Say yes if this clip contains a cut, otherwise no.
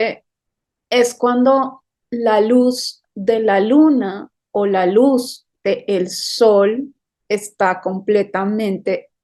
no